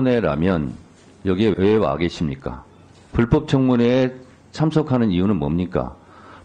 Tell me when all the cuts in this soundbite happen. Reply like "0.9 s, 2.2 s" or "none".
1.5 s